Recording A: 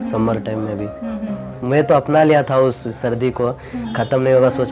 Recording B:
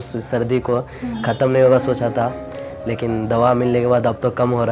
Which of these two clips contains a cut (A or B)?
A